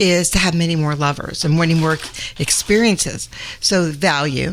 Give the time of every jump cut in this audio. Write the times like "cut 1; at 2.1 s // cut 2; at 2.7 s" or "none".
none

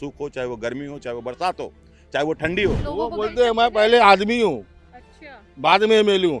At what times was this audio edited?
cut 1; at 2.9 s

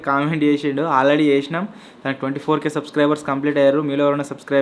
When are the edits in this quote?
none

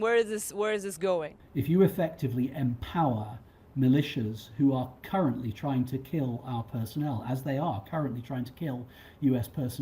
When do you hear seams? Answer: cut 1; at 1.4 s

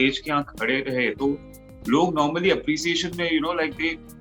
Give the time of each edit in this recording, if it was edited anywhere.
none

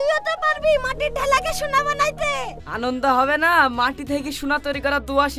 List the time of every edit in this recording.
cut 1; at 2.6 s

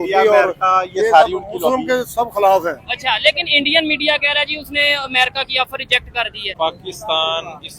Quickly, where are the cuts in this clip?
cut 1; at 6.5 s

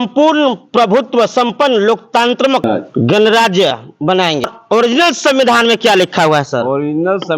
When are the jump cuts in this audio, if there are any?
cut 1; at 4.6 s

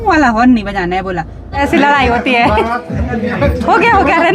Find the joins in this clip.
cut 1; at 1.5 s

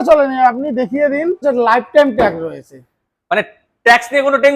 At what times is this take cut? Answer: cut 1; at 1.4 s

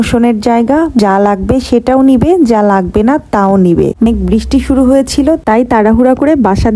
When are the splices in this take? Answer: cut 1; at 1.0 s // cut 2; at 4.0 s

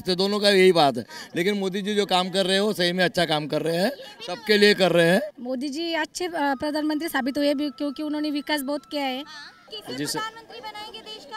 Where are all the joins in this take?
cut 1; at 5.4 s // cut 2; at 9.7 s

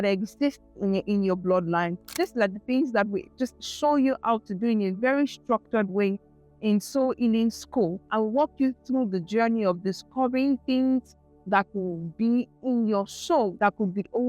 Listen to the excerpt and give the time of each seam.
cut 1; at 1.0 s // cut 2; at 2.1 s // cut 3; at 8.0 s // cut 4; at 13.5 s

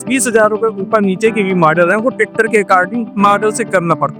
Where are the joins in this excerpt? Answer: none

